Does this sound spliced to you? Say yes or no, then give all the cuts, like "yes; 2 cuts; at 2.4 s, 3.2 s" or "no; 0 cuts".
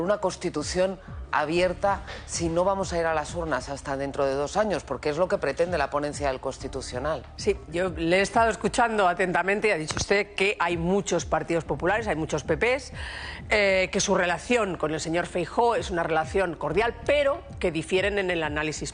yes; 1 cut; at 7.3 s